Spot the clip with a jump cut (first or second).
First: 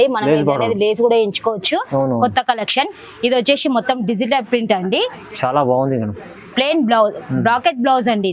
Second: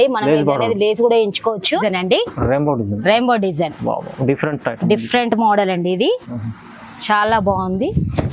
second